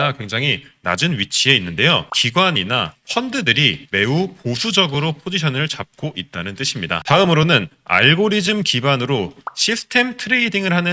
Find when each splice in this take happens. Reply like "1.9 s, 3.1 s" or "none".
2.1 s, 7.0 s